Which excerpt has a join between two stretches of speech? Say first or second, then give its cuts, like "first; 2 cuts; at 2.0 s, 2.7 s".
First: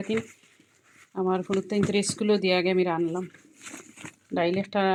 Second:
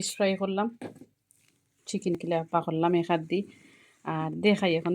second; 1 cut; at 2.2 s